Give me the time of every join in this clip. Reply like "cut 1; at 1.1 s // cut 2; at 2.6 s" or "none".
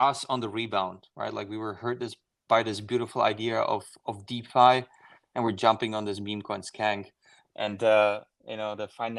none